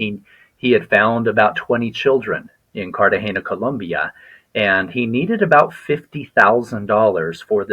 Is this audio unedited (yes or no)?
yes